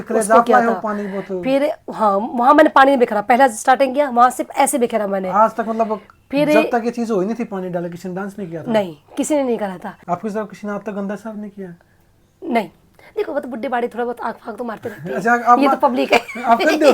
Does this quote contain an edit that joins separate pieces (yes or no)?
yes